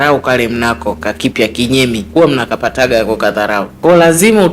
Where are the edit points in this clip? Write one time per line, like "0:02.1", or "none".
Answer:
0:02.0
0:03.7